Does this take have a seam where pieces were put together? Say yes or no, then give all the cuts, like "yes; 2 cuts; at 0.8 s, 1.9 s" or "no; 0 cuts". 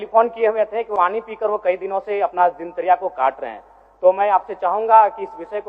yes; 1 cut; at 0.9 s